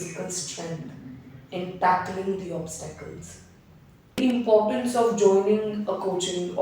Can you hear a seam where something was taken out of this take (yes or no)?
yes